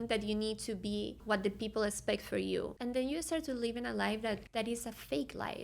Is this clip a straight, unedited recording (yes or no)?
no